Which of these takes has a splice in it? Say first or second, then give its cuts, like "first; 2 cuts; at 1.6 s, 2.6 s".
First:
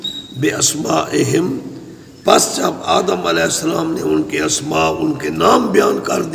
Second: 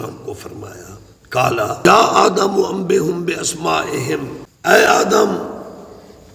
second; 2 cuts; at 1.9 s, 4.4 s